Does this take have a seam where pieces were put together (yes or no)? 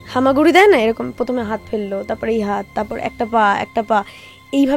no